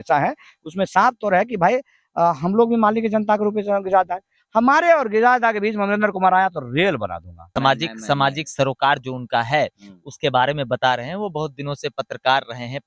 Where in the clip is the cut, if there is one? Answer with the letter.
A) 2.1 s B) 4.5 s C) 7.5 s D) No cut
C